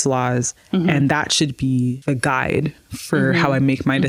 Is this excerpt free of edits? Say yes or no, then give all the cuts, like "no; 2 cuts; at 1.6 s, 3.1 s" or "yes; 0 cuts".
no; 1 cut; at 2.0 s